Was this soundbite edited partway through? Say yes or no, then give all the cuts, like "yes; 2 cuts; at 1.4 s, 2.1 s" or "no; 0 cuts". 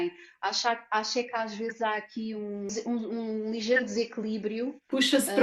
yes; 1 cut; at 2.7 s